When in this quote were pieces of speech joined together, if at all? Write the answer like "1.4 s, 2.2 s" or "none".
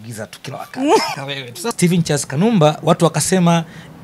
1.2 s